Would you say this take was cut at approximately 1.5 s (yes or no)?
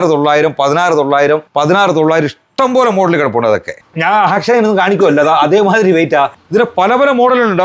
yes